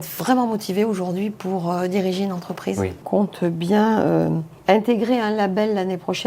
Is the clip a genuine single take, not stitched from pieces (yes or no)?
no